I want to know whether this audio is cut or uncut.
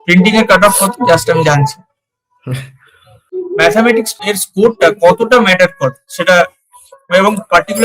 cut